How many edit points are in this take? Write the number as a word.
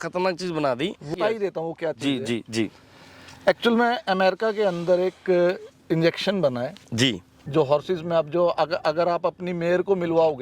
two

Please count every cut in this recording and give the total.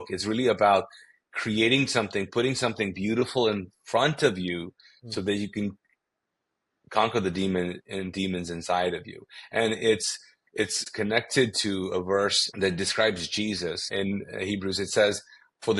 three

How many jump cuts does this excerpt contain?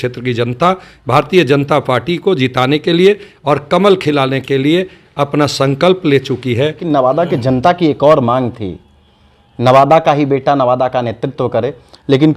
one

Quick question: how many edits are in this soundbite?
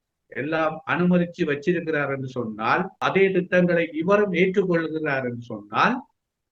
one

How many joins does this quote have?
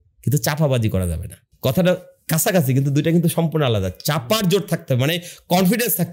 zero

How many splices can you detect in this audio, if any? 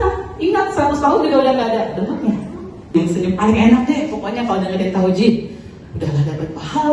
one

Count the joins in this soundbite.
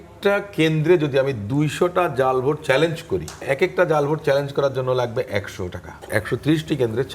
two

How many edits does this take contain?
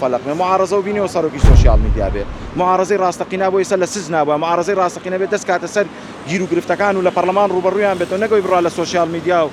zero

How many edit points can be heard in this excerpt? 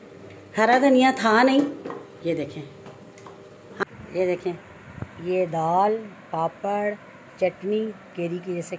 one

